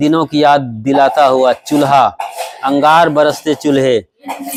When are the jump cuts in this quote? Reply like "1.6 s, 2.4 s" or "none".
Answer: none